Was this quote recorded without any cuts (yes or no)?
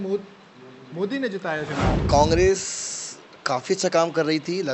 no